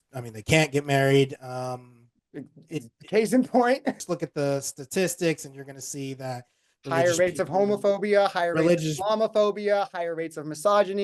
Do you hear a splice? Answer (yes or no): yes